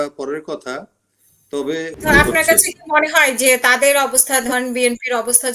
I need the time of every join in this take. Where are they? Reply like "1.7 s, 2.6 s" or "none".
1.9 s